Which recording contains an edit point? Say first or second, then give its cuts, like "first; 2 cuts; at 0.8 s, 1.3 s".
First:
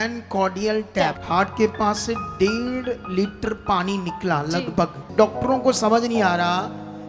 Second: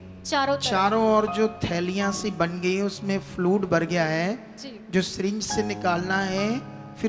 first; 2 cuts; at 1.2 s, 5.1 s